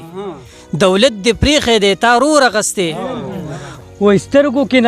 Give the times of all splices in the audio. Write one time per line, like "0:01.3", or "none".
0:03.9